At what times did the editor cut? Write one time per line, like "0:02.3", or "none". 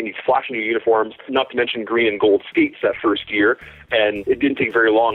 0:01.3
0:04.2